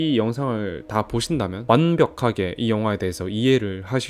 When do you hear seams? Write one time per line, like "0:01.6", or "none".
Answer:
0:01.6